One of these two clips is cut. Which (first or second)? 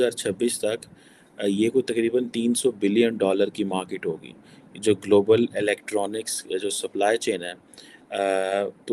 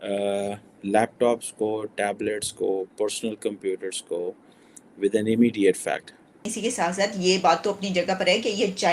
second